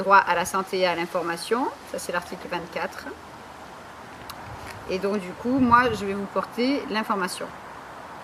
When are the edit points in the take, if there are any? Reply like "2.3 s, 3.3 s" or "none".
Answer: none